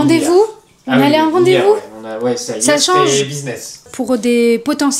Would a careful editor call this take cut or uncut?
uncut